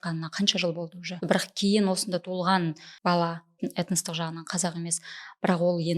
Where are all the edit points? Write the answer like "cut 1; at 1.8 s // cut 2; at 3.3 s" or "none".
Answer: cut 1; at 1.1 s // cut 2; at 2.9 s // cut 3; at 3.6 s